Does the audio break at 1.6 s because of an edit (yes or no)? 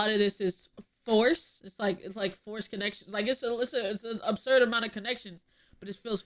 yes